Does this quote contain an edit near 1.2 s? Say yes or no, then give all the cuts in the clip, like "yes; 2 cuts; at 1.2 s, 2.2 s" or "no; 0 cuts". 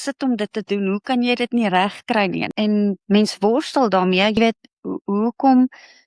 no; 2 cuts; at 2.5 s, 4.4 s